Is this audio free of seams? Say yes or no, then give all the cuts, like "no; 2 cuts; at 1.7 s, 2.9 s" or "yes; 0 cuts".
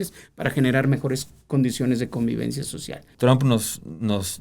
no; 1 cut; at 3.0 s